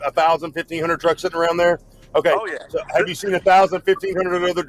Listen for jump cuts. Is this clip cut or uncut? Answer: uncut